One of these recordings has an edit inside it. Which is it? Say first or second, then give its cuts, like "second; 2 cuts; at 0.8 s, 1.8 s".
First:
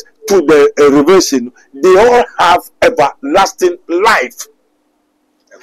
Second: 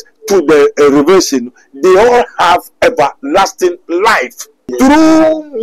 second; 1 cut; at 4.7 s